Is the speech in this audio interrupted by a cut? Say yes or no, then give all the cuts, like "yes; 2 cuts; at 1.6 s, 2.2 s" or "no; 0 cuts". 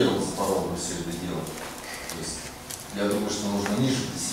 no; 0 cuts